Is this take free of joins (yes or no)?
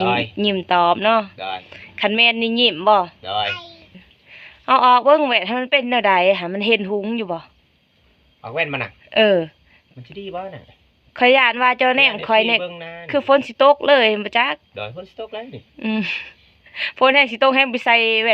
no